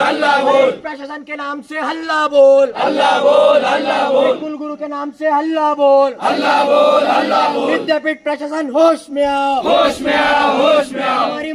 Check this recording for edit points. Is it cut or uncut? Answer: uncut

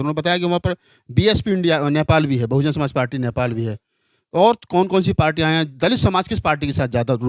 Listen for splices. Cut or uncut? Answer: uncut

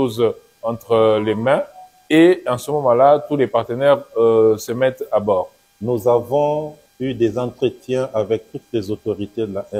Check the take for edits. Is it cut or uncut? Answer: cut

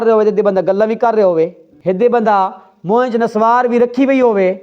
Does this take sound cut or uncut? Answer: cut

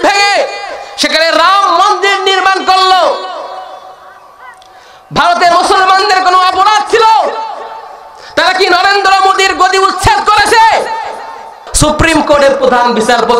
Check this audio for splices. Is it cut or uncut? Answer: cut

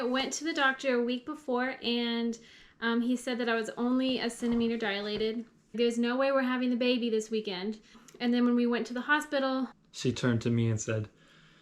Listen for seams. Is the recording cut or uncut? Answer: cut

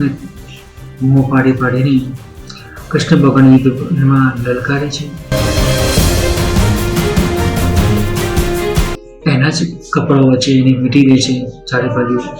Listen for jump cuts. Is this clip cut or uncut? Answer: cut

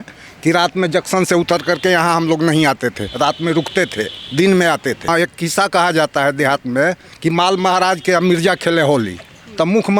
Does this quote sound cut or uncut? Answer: cut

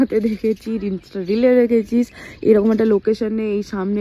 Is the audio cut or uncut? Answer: uncut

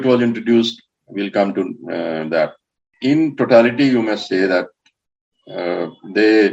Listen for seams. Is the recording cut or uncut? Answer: cut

